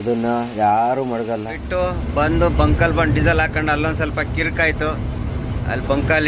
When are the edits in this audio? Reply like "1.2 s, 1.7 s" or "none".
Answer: 1.6 s